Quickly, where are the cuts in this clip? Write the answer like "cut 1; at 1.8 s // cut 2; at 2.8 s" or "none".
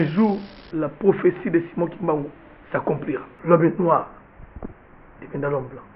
cut 1; at 3.3 s